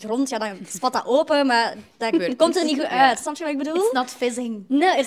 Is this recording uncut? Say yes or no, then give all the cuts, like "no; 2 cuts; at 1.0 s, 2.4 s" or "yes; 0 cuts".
yes; 0 cuts